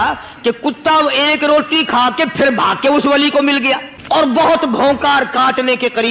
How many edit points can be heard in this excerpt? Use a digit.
1